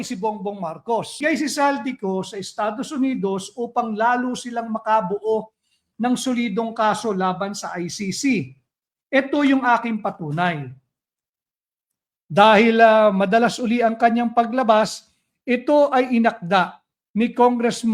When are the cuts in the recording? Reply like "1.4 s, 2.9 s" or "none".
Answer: 1.2 s